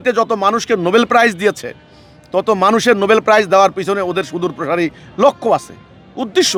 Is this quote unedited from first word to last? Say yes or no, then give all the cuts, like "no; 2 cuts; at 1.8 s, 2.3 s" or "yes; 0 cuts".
yes; 0 cuts